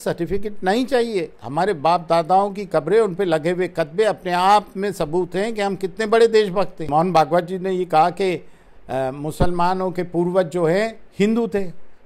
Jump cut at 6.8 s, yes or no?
yes